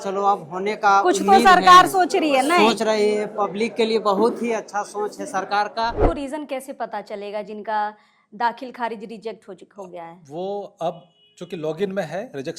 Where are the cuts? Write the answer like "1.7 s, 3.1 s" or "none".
6.0 s